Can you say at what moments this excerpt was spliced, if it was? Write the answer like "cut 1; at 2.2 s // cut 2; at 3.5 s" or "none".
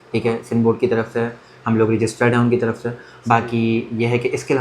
none